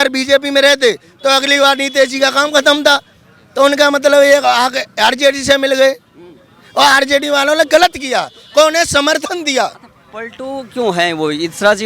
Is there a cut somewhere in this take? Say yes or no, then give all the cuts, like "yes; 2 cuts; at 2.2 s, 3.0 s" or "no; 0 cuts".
no; 0 cuts